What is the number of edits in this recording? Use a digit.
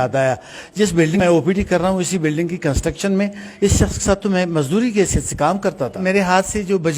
2